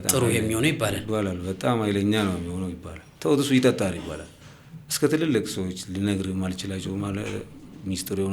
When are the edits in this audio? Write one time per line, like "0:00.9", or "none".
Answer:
none